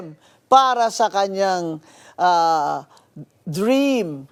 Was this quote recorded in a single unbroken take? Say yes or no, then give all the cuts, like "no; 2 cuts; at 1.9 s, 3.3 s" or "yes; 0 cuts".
yes; 0 cuts